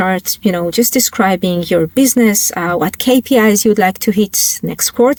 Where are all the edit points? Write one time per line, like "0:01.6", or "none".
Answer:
none